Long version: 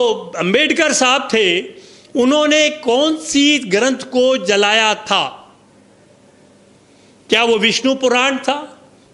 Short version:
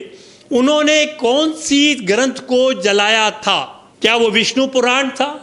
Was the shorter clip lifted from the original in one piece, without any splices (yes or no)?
no